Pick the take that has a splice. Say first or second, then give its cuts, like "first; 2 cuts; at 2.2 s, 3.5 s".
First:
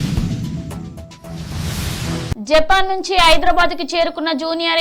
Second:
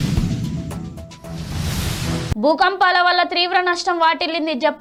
first; 1 cut; at 2.3 s